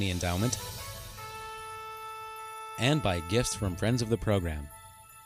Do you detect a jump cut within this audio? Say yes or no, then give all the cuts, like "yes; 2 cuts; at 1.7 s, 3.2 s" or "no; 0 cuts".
no; 0 cuts